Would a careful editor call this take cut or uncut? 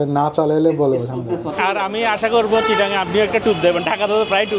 cut